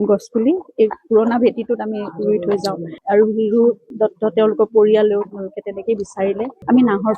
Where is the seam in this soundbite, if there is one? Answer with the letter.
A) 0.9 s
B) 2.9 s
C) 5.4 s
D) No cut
D